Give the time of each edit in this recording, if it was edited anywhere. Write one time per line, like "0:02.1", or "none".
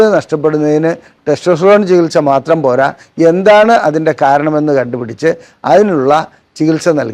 none